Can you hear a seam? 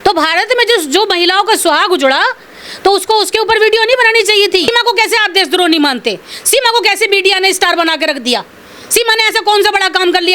yes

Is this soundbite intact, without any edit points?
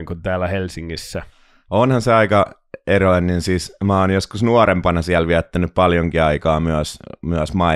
yes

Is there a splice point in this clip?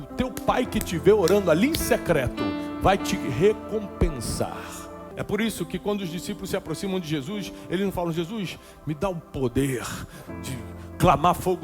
yes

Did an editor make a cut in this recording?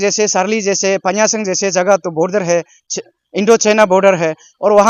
no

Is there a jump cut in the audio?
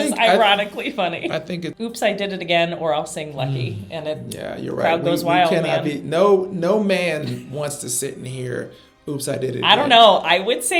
yes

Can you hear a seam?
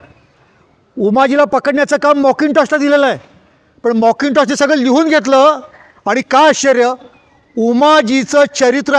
no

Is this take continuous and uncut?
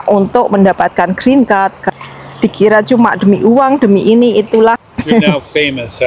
no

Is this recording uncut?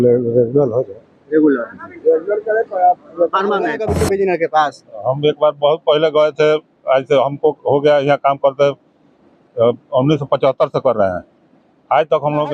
no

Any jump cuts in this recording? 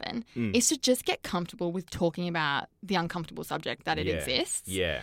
yes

